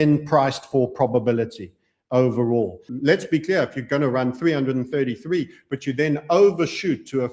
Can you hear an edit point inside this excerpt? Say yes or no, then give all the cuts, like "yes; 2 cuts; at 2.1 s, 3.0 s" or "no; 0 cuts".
yes; 1 cut; at 2.9 s